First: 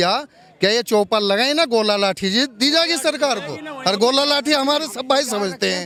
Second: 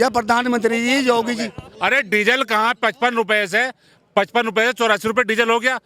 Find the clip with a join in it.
second; 1 cut; at 1.6 s

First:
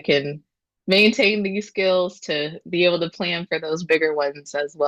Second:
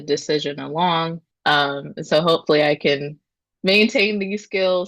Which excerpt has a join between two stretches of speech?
second; 1 cut; at 1.2 s

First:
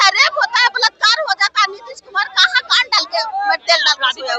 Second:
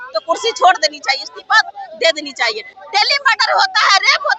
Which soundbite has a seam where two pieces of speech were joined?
second; 1 cut; at 2.7 s

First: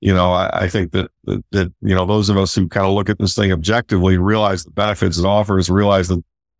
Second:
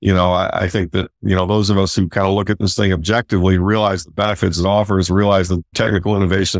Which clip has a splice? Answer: second; 2 cuts; at 1.2 s, 5.7 s

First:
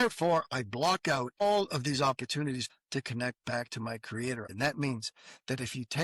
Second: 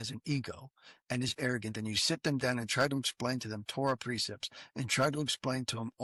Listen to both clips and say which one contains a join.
first; 3 cuts; at 1.4 s, 2.7 s, 4.5 s

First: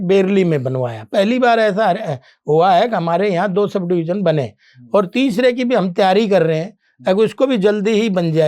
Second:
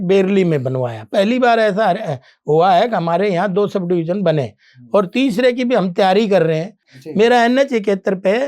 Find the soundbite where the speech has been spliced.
second; 1 cut; at 6.9 s

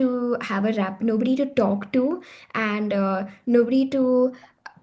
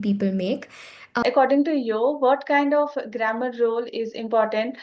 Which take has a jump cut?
second; 1 cut; at 1.2 s

